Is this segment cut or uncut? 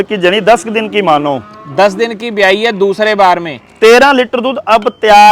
uncut